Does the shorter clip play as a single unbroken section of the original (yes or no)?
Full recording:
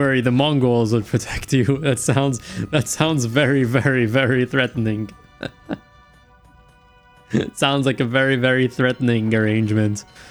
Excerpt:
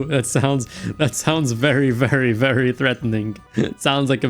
no